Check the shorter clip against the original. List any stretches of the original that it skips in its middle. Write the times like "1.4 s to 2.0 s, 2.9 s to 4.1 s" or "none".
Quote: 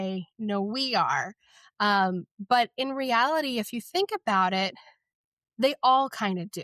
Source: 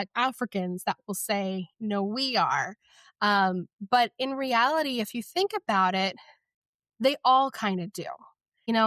none